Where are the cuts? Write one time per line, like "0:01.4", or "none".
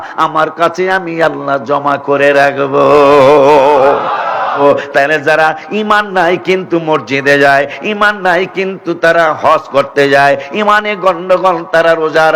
0:04.5